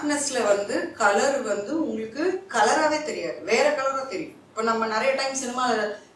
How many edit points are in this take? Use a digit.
0